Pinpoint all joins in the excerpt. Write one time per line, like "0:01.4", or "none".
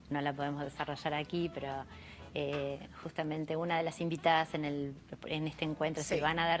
none